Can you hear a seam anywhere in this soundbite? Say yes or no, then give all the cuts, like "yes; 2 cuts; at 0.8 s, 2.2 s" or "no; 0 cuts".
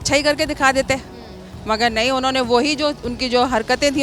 no; 0 cuts